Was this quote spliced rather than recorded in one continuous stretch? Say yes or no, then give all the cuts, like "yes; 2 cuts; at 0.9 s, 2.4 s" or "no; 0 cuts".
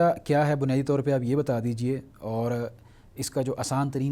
no; 0 cuts